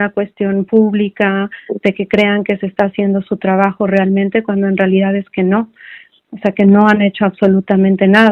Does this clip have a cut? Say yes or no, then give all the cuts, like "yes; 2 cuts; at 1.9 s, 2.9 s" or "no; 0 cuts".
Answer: no; 0 cuts